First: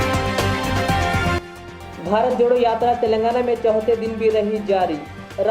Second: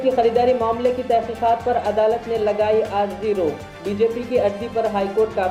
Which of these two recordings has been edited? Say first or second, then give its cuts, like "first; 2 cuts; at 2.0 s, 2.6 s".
first; 1 cut; at 1.4 s